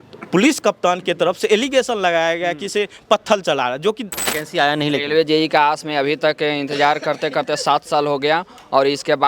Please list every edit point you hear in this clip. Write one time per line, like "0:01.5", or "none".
0:04.2